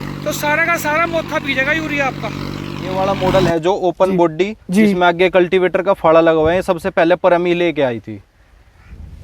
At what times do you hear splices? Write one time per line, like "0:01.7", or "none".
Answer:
0:02.9